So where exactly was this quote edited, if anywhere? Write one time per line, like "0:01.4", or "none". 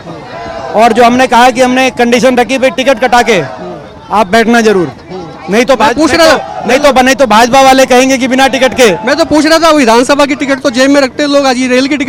none